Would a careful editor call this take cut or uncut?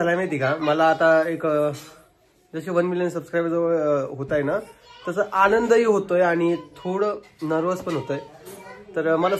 uncut